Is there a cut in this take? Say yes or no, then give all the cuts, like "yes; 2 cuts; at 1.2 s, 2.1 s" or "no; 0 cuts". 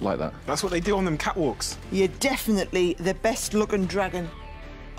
yes; 1 cut; at 1.7 s